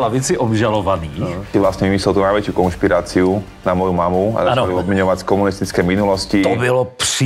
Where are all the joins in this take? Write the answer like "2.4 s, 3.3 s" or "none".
1.5 s